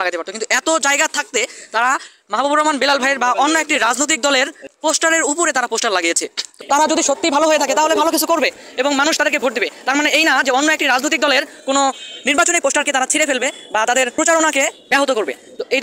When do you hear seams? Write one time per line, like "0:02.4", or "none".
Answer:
0:06.6
0:14.1
0:14.8